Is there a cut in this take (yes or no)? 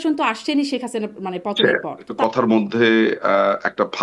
yes